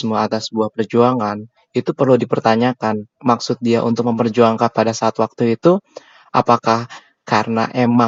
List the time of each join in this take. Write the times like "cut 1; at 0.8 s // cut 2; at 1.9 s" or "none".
none

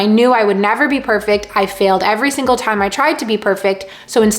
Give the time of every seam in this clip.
none

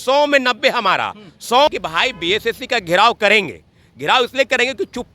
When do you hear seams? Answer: cut 1; at 1.7 s

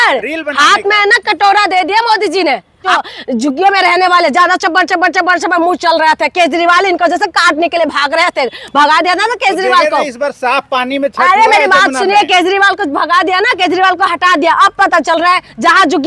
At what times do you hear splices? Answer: cut 1; at 3.0 s

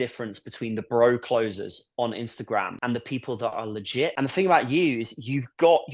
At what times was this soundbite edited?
cut 1; at 4.1 s

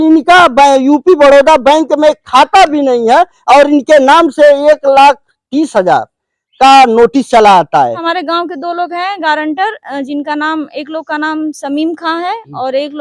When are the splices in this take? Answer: cut 1; at 8.1 s

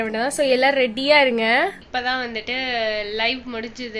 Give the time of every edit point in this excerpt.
cut 1; at 1.8 s

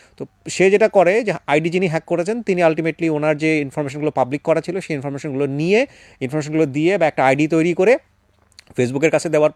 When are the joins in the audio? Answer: none

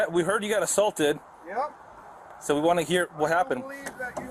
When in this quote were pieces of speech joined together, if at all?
none

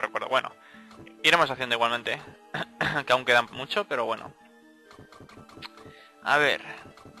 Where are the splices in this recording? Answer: cut 1; at 2.9 s

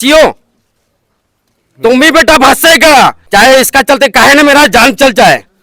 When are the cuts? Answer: cut 1; at 3.2 s

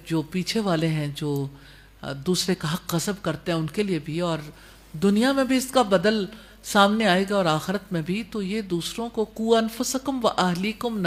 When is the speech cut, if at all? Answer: none

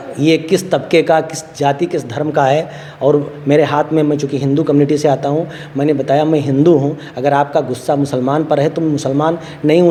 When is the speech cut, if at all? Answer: none

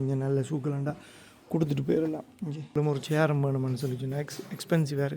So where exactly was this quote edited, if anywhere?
cut 1; at 2.8 s

